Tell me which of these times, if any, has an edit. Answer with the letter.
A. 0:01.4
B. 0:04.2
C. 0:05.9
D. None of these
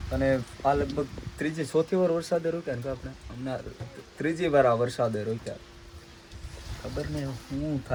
D